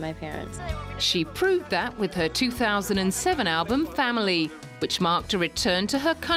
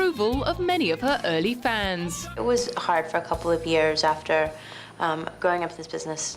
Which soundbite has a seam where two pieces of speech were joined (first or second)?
second